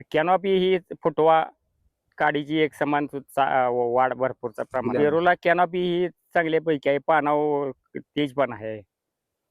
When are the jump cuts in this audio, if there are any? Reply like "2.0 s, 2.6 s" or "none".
4.8 s